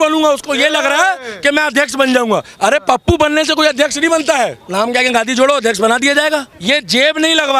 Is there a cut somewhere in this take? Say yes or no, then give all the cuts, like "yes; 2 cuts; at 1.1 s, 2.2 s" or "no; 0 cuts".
yes; 2 cuts; at 4.6 s, 6.5 s